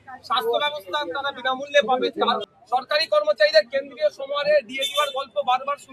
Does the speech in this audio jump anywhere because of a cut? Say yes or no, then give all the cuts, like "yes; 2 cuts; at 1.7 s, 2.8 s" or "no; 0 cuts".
yes; 1 cut; at 2.5 s